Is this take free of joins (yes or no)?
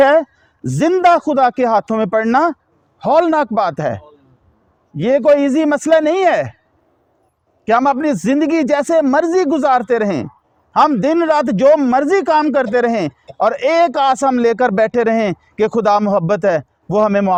yes